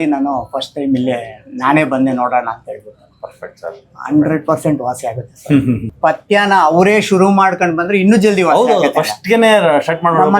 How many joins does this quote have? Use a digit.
1